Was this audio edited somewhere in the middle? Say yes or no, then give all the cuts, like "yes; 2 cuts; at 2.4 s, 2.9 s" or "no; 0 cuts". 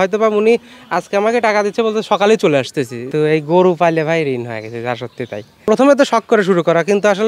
yes; 2 cuts; at 3.0 s, 5.7 s